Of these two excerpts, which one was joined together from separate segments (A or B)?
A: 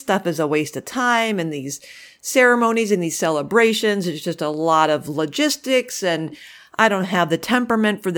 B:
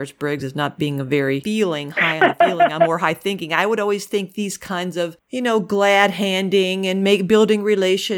B